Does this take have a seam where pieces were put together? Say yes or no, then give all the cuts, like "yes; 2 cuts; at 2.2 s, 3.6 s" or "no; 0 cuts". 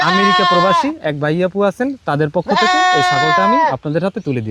no; 0 cuts